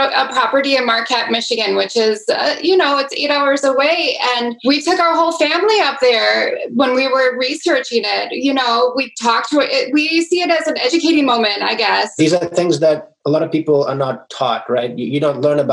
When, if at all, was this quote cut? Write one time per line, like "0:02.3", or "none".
0:01.6
0:04.5
0:10.9
0:12.1